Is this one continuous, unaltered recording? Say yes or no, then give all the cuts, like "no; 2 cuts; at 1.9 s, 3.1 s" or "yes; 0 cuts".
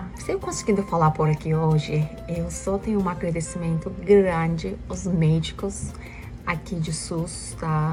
yes; 0 cuts